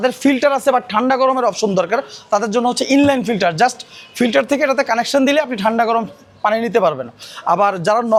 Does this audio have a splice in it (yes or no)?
no